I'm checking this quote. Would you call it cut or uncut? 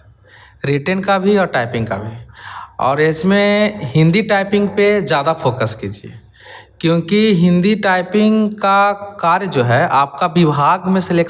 uncut